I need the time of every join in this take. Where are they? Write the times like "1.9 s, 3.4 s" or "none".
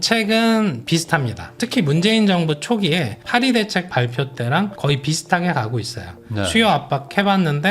1.5 s